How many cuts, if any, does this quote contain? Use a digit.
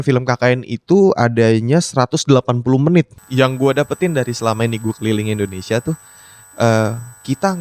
1